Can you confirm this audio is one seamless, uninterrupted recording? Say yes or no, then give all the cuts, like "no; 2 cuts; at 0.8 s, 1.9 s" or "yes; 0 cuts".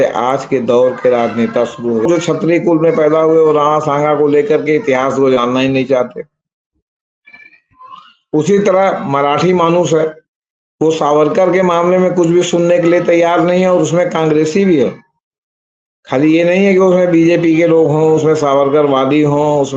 no; 1 cut; at 2.1 s